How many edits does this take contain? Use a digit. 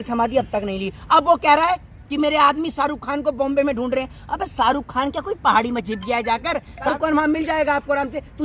1